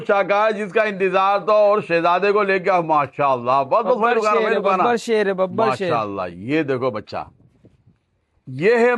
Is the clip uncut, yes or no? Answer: yes